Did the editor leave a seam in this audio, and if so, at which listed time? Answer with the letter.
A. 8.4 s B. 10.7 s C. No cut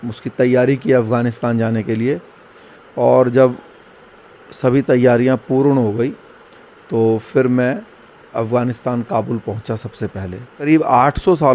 B